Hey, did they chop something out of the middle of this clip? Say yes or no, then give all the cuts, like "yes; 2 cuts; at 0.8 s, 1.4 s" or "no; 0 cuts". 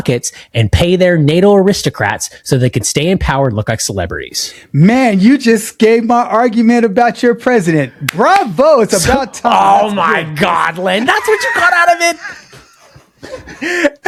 no; 0 cuts